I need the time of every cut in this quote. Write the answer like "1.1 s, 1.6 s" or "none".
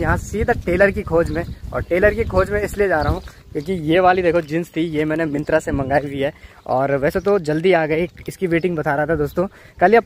none